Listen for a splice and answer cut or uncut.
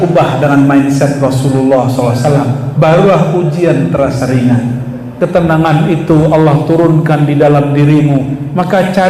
cut